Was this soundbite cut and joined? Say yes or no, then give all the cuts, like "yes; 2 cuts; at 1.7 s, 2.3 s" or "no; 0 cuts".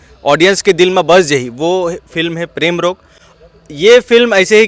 no; 0 cuts